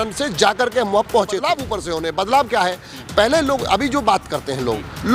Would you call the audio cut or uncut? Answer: cut